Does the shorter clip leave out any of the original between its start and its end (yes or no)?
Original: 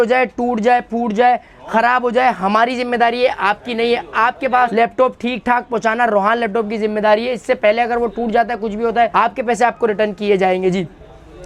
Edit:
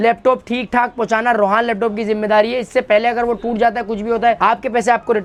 no